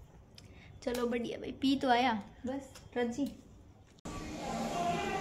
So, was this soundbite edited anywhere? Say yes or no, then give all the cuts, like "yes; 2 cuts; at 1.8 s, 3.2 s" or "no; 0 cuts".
yes; 1 cut; at 4.1 s